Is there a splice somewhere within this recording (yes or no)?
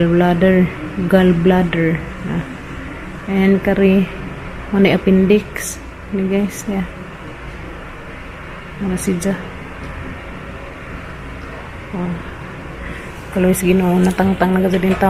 no